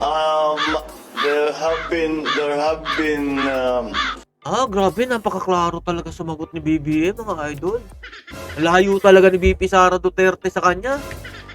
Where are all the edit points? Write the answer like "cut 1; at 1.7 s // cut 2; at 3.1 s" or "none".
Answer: none